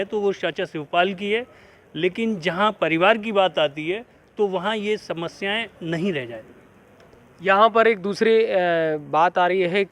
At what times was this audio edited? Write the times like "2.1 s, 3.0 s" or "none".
none